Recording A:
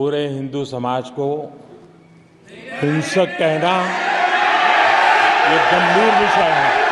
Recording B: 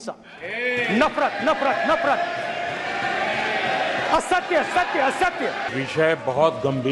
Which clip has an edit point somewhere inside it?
B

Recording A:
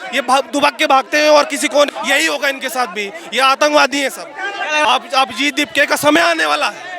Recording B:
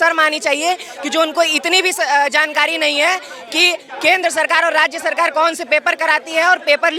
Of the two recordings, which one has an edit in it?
A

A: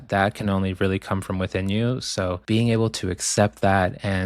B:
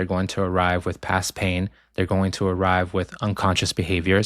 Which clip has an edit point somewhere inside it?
A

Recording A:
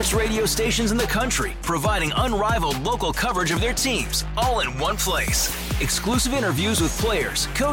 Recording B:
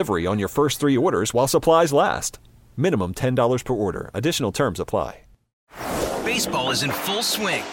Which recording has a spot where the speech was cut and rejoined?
B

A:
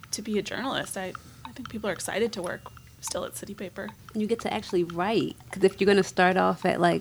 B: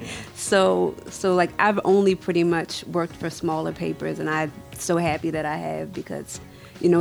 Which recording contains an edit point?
A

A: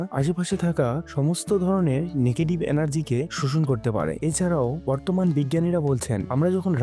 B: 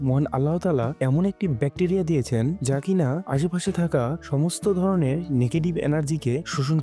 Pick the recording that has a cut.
B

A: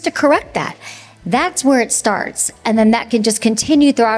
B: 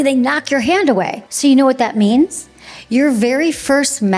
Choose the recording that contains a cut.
B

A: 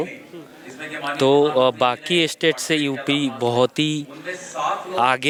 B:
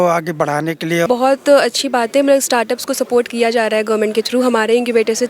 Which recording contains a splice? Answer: B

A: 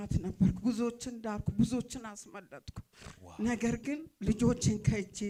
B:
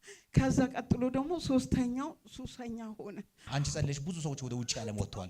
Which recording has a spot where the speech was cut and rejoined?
B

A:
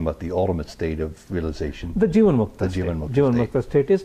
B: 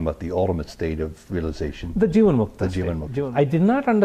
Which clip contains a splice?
B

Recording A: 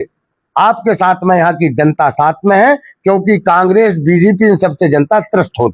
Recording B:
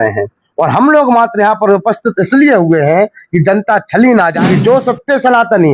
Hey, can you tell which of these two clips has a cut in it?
B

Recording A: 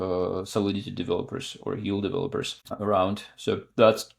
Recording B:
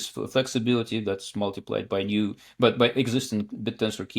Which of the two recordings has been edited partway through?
A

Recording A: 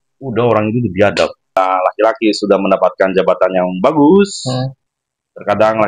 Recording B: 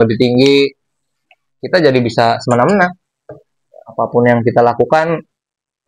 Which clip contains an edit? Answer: A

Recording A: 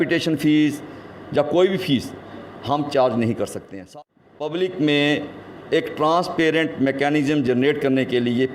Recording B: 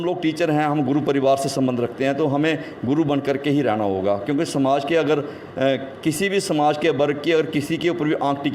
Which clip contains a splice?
A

